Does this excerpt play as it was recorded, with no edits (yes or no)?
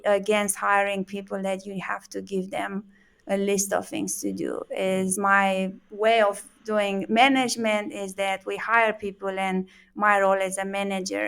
no